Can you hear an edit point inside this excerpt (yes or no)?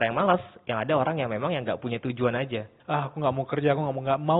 yes